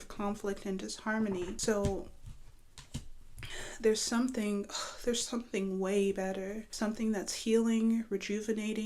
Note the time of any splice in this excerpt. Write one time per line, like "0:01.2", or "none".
0:01.6
0:06.7